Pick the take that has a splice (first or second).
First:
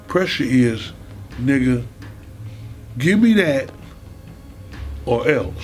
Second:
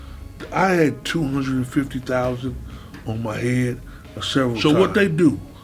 second